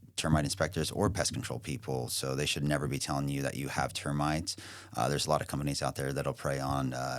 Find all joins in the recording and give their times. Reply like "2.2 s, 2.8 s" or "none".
none